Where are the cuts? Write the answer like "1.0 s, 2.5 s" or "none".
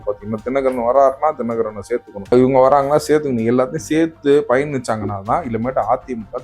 2.3 s